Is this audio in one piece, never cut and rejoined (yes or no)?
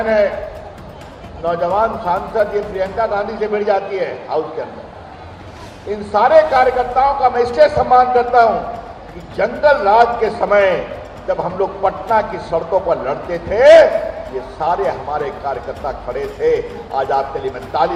yes